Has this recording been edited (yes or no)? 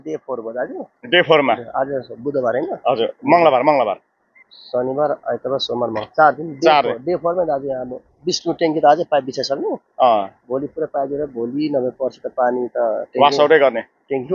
no